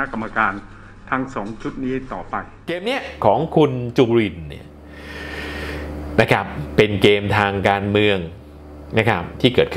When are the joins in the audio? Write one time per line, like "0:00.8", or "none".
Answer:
0:02.8